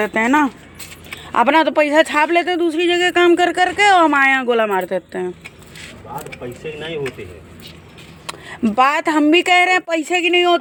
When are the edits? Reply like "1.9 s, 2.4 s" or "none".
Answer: none

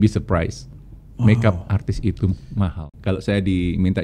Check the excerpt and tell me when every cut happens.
2.8 s

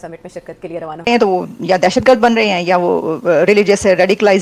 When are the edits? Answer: 1.1 s

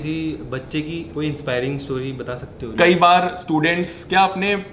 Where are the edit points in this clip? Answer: 2.7 s

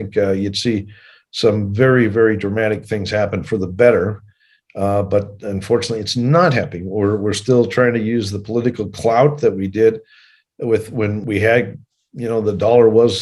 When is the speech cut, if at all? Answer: 11.2 s

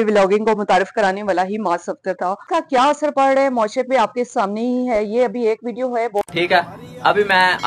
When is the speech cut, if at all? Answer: 2.4 s

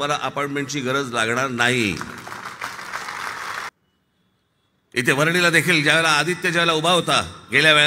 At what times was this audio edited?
3.7 s

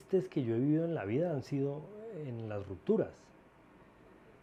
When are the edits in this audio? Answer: none

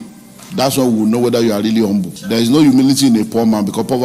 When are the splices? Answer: 2.2 s

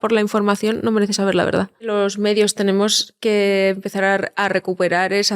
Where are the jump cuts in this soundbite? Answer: 1.9 s

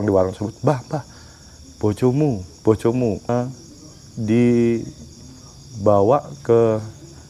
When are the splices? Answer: 3.3 s

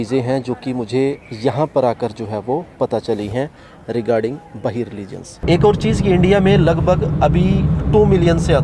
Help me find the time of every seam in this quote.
5.4 s

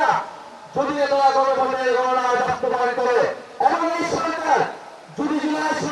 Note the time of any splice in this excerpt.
3.5 s

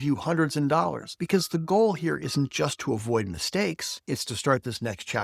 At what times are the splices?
1.1 s

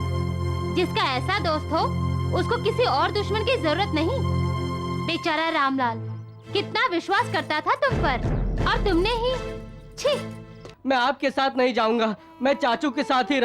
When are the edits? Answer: 10.6 s

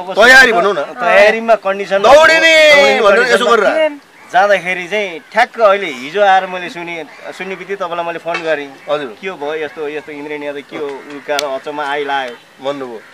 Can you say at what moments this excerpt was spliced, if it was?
none

